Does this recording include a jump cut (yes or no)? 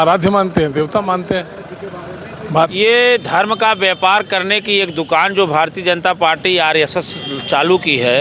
yes